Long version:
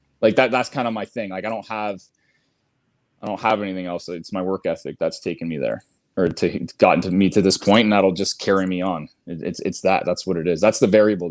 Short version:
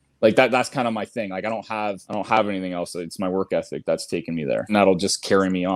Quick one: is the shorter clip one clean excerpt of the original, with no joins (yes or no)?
no